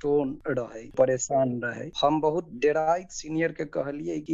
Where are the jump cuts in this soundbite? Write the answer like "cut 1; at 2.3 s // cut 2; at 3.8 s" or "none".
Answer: cut 1; at 0.9 s